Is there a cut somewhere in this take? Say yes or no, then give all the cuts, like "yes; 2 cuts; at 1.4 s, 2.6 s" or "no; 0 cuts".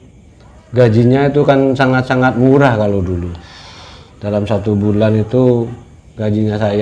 no; 0 cuts